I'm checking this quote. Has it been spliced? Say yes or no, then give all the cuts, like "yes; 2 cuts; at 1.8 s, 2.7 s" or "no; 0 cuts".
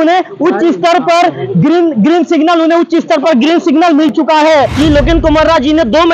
yes; 1 cut; at 4.7 s